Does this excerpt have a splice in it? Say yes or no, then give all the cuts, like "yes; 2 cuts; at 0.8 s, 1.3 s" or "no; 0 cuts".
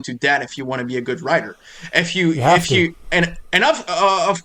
no; 0 cuts